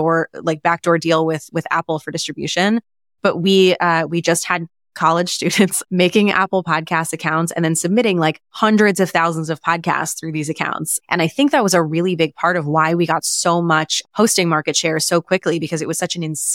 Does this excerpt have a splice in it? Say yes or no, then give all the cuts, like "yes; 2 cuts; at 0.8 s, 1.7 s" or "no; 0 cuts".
yes; 1 cut; at 10.9 s